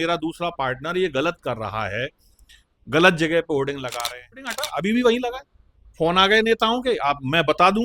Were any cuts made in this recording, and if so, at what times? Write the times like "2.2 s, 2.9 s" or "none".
4.7 s